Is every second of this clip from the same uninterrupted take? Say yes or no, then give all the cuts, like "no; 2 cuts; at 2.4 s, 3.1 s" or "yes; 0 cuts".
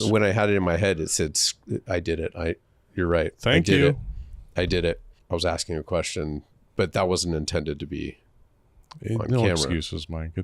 no; 1 cut; at 5.1 s